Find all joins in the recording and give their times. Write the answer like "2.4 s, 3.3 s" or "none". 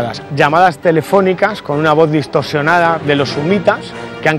none